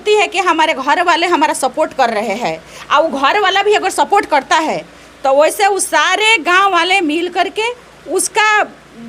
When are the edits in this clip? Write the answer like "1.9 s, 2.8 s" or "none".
none